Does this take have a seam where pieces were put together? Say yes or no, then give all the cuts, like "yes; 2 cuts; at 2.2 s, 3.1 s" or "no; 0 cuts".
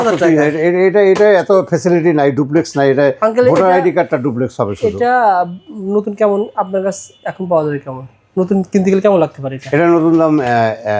no; 0 cuts